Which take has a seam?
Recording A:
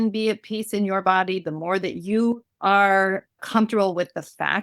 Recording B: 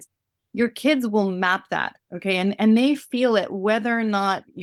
A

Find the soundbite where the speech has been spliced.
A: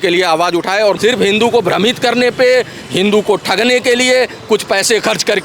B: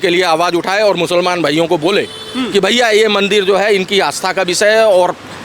A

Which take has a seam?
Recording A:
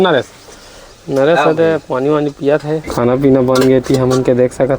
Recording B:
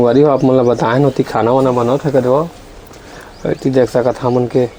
A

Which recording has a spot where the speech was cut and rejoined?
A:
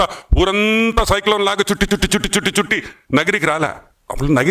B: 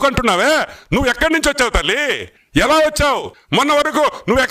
B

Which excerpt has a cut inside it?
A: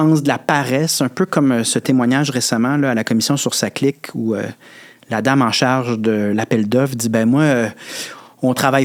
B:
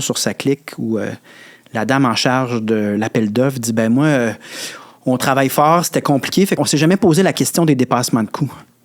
B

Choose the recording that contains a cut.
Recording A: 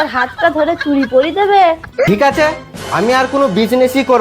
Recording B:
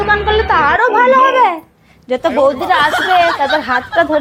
A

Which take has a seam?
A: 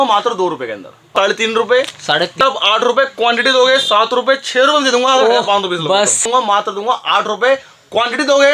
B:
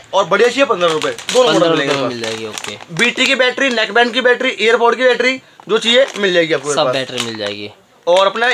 A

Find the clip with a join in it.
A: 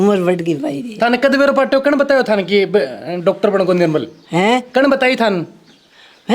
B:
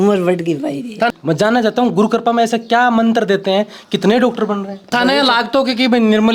B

